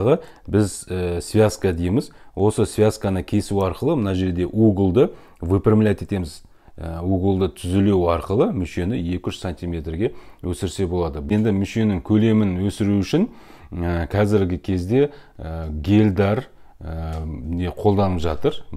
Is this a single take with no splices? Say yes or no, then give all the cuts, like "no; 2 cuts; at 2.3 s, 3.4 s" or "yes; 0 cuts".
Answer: no; 1 cut; at 11.4 s